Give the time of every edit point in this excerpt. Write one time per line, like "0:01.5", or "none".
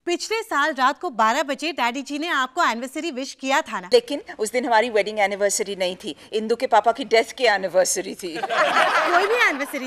0:03.8